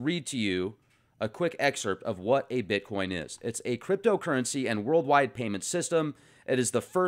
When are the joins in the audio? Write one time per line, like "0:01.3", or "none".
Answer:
0:03.5